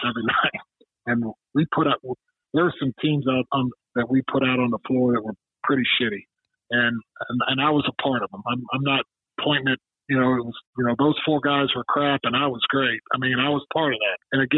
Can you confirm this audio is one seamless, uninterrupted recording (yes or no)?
yes